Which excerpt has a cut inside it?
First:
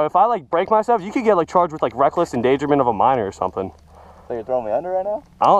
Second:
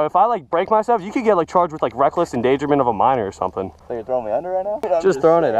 second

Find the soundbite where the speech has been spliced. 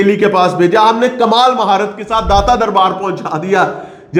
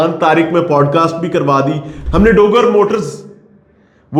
second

